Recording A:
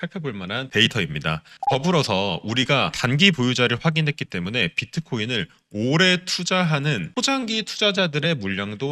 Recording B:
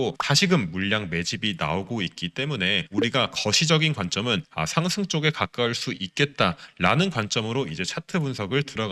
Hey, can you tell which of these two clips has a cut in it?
A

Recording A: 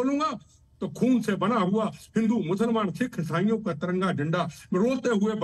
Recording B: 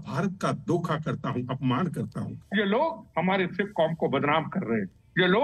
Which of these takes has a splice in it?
B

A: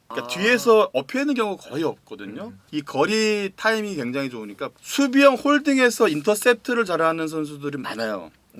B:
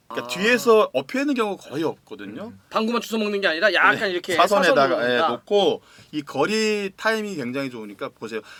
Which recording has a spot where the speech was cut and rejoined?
A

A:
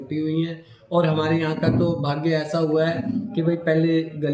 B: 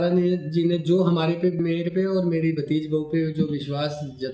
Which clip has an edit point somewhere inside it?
B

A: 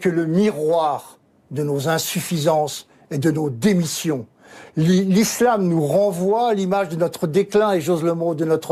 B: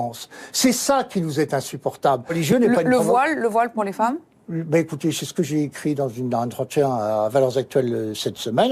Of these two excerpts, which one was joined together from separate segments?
B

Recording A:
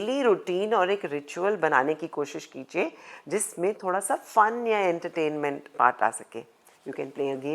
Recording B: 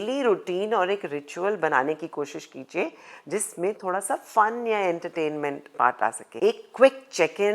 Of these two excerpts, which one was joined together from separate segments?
B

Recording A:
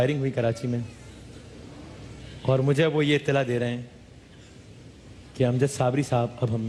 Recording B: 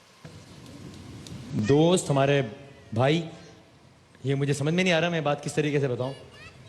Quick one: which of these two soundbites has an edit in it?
B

